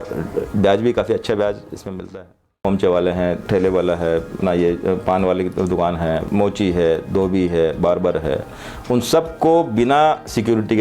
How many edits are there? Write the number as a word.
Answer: one